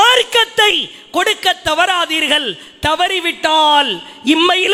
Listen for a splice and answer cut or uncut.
uncut